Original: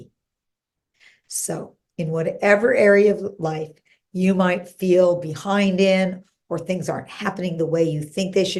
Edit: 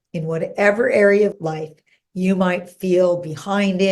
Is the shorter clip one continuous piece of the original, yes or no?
no